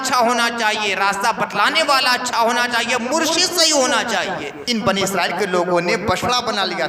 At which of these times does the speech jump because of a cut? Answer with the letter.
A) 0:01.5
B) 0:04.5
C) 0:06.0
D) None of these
B